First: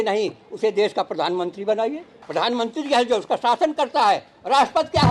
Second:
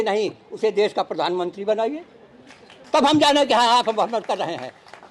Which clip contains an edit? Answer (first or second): first